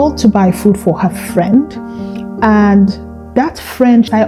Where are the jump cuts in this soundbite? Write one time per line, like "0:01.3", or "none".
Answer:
none